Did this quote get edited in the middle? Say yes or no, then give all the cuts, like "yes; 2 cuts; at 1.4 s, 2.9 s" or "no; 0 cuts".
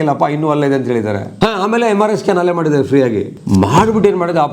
yes; 2 cuts; at 1.3 s, 3.3 s